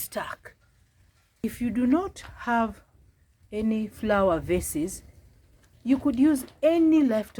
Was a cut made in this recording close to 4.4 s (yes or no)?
no